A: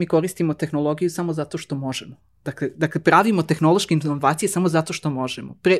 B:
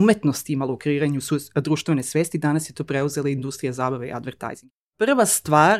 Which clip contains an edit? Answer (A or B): B